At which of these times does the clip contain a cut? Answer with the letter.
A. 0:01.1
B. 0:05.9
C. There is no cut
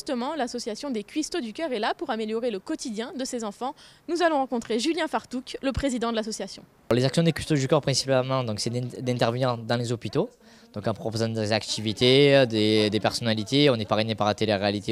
C